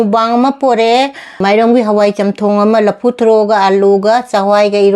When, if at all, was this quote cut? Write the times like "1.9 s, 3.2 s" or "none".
1.2 s